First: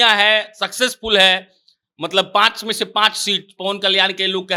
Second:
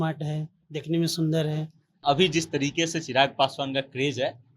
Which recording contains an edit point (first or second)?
second